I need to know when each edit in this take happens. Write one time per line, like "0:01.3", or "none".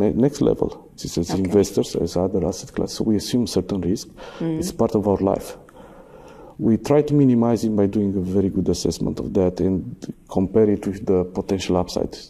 0:01.0